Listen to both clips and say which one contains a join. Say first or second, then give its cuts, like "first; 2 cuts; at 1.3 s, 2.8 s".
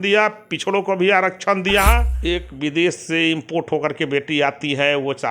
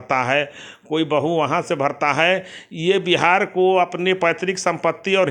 first; 1 cut; at 2.1 s